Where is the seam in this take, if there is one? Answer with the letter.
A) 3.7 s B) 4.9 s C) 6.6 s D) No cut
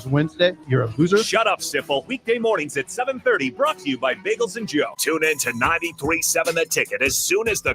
B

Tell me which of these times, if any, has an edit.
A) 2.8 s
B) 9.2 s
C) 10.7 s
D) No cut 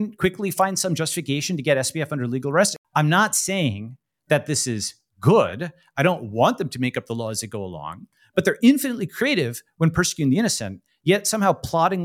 A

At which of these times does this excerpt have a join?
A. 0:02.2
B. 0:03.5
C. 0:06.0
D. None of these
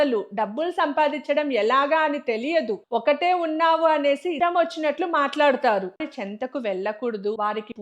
C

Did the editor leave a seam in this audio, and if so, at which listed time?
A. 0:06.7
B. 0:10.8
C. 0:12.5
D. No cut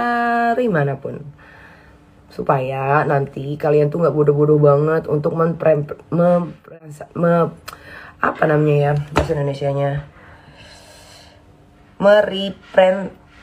A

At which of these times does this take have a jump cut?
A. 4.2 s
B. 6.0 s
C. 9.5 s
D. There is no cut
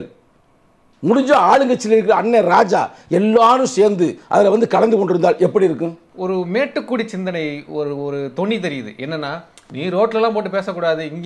B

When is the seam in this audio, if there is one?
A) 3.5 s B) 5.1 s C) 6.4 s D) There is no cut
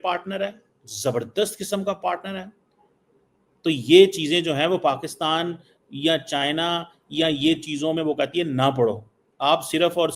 D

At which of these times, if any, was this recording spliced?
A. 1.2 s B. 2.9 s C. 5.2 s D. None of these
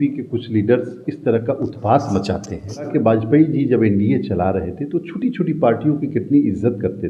B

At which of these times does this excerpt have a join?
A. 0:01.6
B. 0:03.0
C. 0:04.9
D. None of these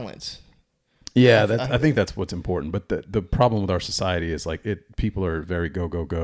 D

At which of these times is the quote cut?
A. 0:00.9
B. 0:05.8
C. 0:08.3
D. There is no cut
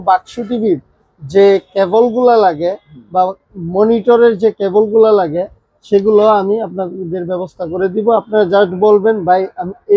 D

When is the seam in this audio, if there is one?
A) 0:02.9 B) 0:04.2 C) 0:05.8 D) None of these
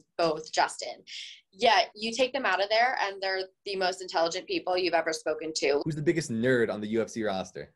C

